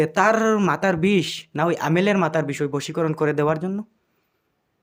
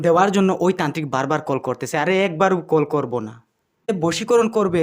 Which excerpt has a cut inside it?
second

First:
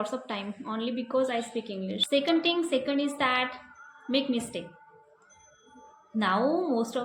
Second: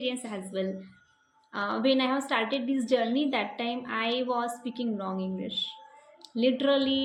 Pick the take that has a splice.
first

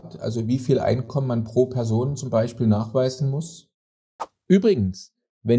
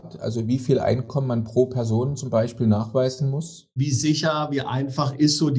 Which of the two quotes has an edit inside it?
second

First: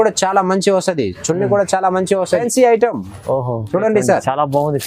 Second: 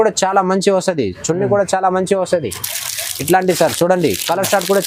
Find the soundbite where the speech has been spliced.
first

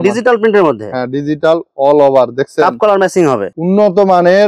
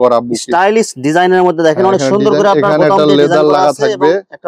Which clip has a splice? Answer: first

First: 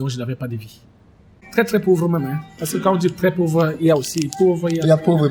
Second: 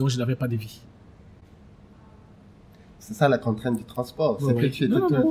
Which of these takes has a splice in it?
first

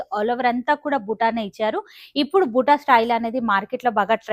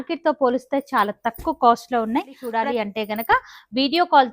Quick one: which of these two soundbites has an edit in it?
second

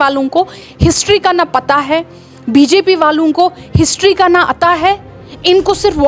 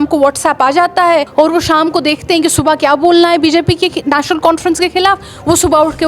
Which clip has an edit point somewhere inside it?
second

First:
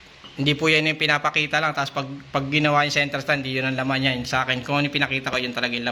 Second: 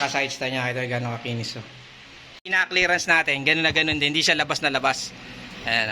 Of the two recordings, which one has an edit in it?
second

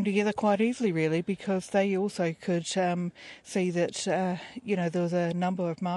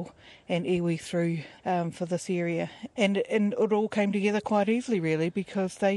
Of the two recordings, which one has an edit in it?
second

